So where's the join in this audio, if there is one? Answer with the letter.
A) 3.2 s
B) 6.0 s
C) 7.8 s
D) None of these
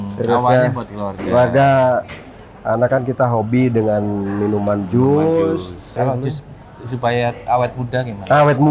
B